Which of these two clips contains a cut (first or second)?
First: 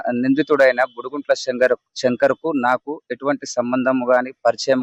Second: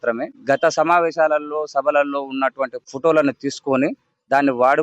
second